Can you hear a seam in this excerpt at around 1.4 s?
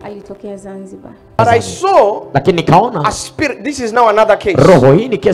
yes; 1 cut; at 1.4 s

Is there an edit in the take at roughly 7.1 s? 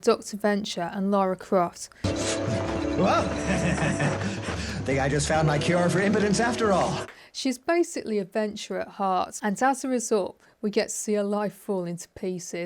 yes; 3 cuts; at 2.1 s, 7.1 s, 9.3 s

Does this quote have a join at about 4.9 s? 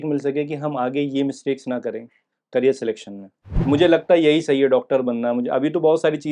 no; 1 cut; at 3.5 s

